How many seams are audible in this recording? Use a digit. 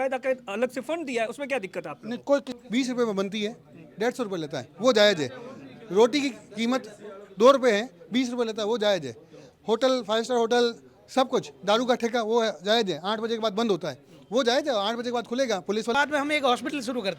2